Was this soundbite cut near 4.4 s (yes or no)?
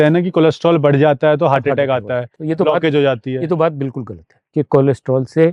yes